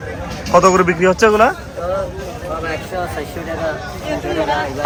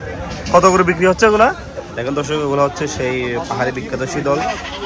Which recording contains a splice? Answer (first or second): second